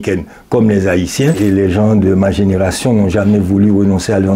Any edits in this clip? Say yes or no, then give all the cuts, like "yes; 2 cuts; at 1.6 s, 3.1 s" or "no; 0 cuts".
yes; 1 cut; at 1.4 s